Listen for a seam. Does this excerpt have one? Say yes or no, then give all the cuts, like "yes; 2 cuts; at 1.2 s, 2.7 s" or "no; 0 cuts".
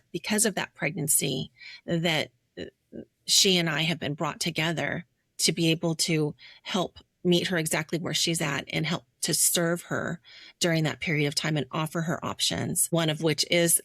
yes; 1 cut; at 12.9 s